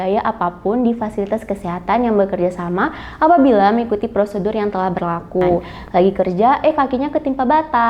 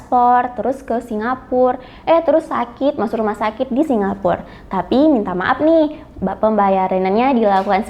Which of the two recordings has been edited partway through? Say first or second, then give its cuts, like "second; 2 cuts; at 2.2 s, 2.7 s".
first; 1 cut; at 5.7 s